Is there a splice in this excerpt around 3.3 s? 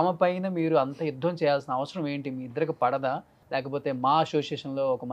yes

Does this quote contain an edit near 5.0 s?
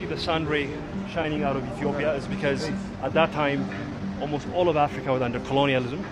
no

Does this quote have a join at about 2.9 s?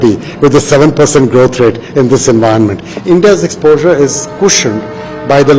yes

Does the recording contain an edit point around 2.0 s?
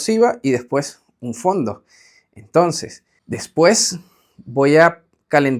no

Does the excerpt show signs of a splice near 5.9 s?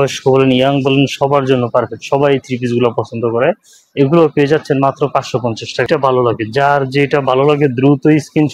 yes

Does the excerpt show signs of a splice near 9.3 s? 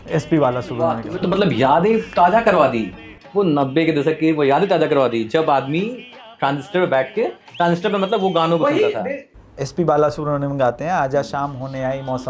yes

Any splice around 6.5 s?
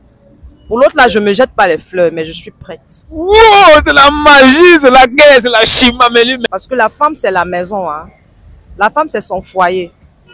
yes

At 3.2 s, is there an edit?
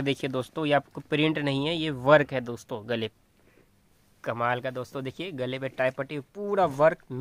yes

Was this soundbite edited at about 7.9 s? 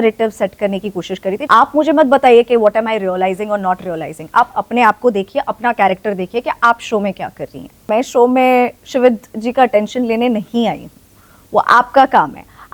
yes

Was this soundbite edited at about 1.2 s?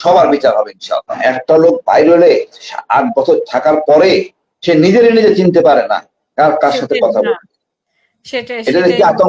yes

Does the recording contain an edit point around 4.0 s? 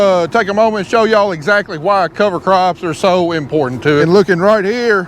yes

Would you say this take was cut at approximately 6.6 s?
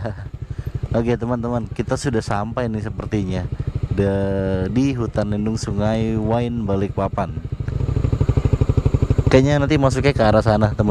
no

